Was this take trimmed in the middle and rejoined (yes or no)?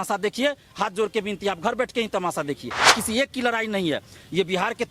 yes